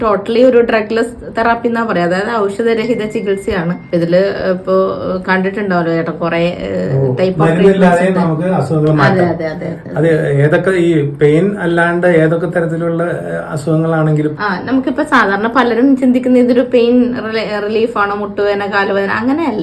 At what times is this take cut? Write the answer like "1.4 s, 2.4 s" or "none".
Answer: none